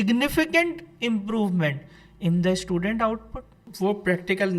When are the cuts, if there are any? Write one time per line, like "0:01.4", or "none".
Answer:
0:03.6